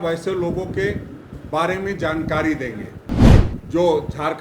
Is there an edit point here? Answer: yes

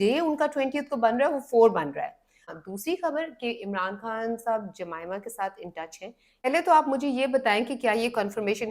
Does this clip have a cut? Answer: yes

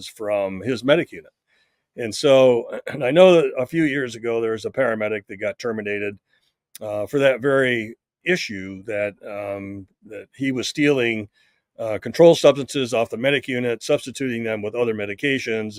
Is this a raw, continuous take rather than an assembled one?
yes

